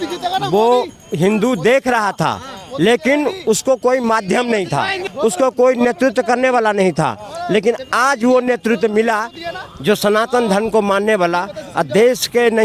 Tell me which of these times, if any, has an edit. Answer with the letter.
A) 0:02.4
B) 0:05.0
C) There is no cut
B